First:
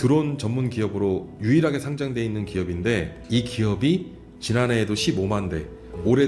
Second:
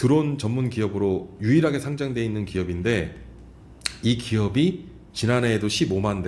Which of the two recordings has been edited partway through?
first; 1 cut; at 3.2 s

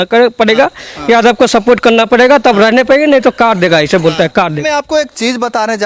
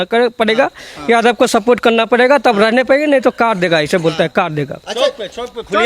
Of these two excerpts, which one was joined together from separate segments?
first; 1 cut; at 4.6 s

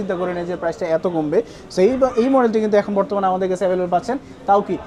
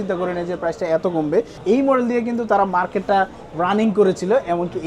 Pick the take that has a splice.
second; 1 cut; at 1.5 s

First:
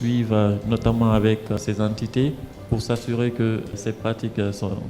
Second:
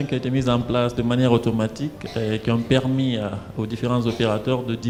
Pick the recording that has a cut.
first; 2 cuts; at 1.6 s, 3.8 s

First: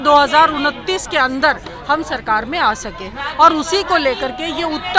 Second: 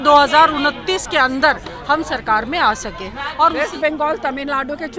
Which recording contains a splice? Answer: second; 1 cut; at 3.5 s

